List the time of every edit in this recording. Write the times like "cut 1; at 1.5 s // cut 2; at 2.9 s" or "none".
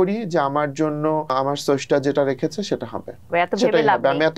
cut 1; at 1.3 s // cut 2; at 3.3 s